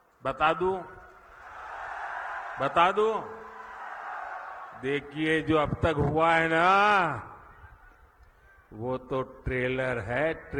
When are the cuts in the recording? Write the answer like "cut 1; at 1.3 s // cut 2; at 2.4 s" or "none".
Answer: none